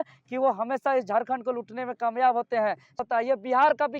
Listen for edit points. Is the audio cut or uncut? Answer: cut